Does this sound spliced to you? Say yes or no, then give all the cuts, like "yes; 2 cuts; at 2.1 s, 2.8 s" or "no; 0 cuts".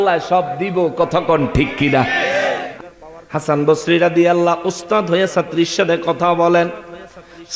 yes; 1 cut; at 2.7 s